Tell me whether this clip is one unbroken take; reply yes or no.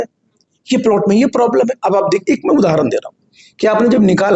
yes